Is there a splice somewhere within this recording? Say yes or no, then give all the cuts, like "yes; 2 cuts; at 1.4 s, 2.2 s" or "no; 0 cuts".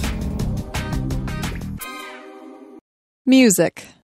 yes; 1 cut; at 2.8 s